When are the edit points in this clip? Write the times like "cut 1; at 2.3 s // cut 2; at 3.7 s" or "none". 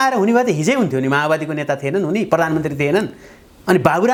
none

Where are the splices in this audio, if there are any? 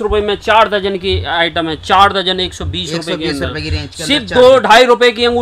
none

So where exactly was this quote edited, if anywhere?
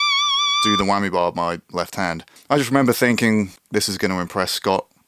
cut 1; at 2.3 s // cut 2; at 3.6 s

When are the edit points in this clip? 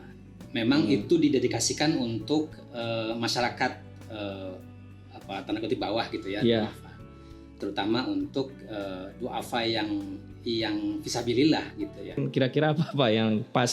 cut 1; at 12.2 s

